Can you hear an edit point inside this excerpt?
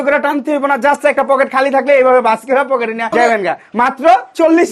yes; 1 cut; at 3.2 s

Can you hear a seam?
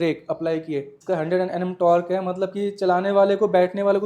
yes; 1 cut; at 0.9 s

